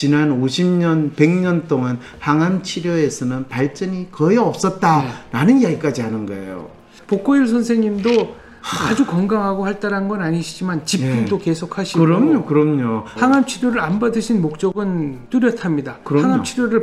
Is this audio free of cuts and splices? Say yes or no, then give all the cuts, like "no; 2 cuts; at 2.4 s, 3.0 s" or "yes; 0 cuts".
no; 3 cuts; at 6.9 s, 13.1 s, 15.2 s